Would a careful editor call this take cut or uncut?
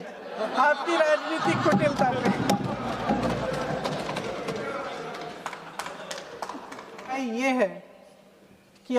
cut